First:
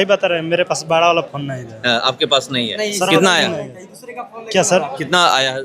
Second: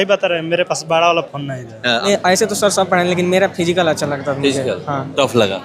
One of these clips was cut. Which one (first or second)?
second